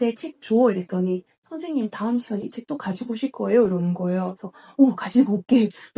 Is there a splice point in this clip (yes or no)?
no